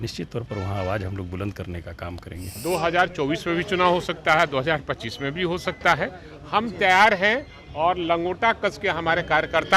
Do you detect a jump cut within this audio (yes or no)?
yes